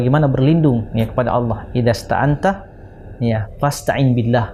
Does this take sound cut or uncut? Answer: uncut